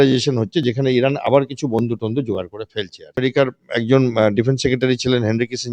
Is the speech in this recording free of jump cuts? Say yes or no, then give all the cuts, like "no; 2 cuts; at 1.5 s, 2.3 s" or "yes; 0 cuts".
no; 1 cut; at 3.2 s